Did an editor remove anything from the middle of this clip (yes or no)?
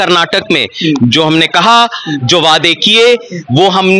no